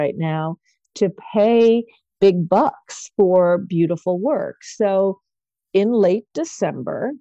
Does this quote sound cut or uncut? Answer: uncut